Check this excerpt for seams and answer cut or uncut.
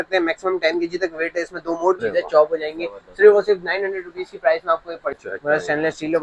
cut